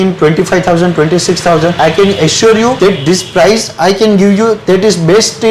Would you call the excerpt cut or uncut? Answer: cut